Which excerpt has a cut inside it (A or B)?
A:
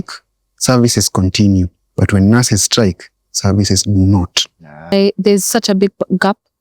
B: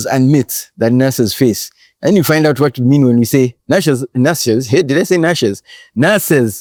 A